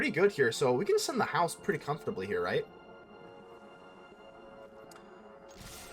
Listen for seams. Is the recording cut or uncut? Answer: uncut